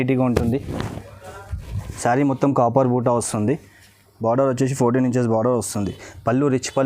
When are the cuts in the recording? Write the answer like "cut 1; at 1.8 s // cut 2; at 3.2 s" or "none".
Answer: cut 1; at 1.8 s